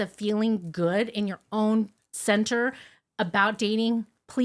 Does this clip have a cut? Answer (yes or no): no